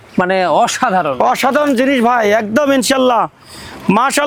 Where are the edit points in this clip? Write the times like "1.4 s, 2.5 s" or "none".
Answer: none